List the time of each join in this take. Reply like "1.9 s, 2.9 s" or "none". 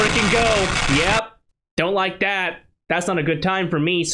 none